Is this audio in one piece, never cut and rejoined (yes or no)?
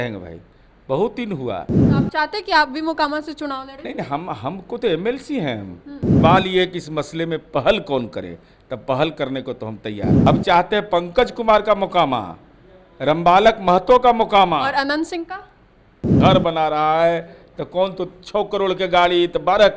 no